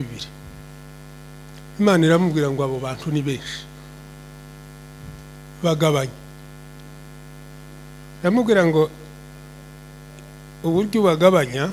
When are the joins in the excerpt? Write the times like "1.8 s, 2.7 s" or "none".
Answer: none